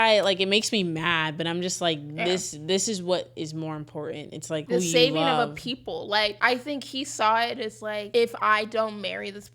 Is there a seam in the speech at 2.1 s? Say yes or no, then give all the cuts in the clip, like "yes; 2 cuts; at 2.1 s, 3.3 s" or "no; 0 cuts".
no; 3 cuts; at 4.7 s, 6.4 s, 8.1 s